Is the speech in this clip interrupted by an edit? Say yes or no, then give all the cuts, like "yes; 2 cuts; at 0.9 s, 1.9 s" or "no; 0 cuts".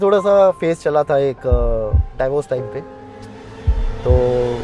no; 0 cuts